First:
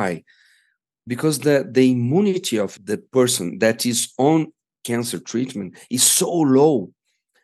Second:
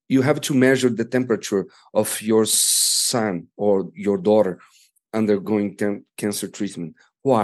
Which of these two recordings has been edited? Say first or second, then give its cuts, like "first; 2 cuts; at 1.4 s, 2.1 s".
first; 2 cuts; at 2.8 s, 4.7 s